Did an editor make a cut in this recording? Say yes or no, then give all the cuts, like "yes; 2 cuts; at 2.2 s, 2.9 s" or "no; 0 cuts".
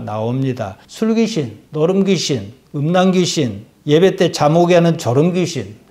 no; 0 cuts